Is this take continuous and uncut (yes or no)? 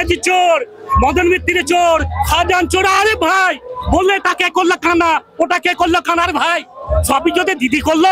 yes